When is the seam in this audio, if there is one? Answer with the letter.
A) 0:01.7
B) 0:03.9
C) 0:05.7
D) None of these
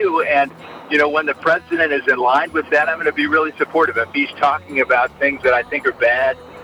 D